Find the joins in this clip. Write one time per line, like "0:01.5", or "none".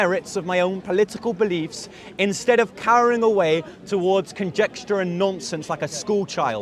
none